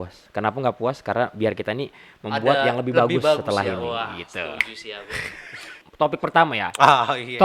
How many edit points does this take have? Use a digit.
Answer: 1